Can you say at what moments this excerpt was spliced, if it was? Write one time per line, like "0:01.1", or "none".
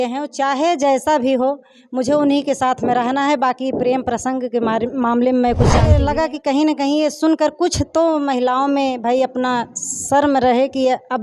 0:05.9